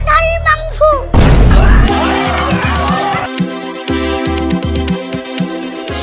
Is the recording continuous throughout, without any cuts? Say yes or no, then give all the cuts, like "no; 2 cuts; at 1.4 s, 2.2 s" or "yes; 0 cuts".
yes; 0 cuts